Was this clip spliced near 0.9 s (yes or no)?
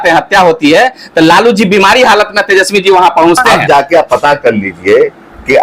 no